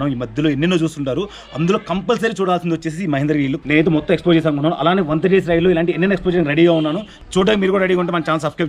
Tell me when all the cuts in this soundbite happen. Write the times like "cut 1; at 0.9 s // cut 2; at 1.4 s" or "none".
cut 1; at 3.6 s